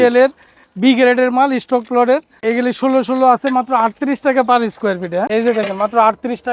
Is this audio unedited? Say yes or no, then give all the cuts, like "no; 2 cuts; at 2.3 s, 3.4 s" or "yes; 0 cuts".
no; 2 cuts; at 2.4 s, 5.3 s